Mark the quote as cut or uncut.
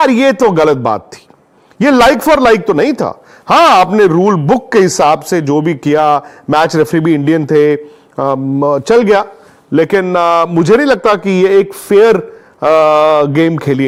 uncut